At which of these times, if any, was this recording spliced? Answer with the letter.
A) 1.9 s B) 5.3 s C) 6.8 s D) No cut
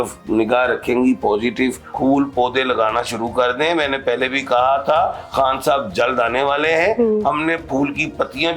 A